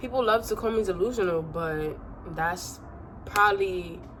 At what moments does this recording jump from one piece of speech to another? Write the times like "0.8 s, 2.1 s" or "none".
none